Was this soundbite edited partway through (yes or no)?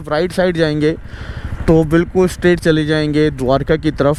no